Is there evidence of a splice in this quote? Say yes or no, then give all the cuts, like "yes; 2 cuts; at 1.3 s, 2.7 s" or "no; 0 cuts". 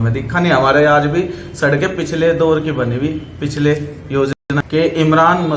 yes; 1 cut; at 4.3 s